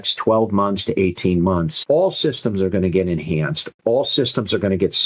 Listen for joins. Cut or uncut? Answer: uncut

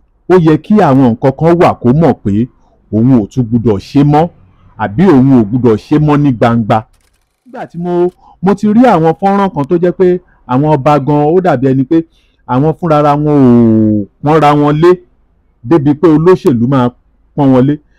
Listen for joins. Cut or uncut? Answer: cut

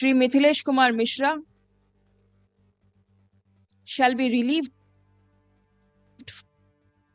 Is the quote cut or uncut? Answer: uncut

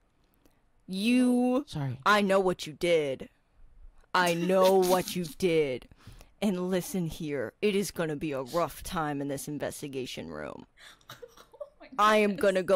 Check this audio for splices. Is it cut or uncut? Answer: uncut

